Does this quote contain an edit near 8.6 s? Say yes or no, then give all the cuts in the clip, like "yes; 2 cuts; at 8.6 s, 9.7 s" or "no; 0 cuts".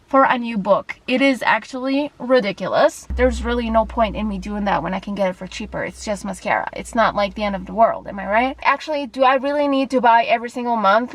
yes; 2 cuts; at 3.1 s, 8.6 s